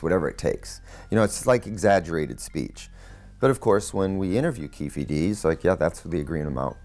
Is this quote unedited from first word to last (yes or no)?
yes